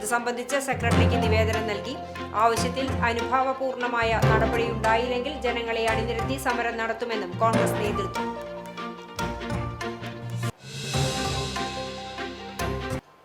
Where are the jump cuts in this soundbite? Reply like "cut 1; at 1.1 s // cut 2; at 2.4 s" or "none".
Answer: cut 1; at 12.3 s